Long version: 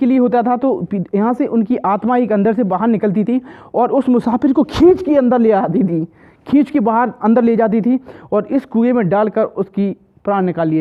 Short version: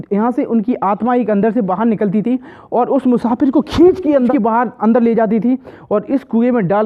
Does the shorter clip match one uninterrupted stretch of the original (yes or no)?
no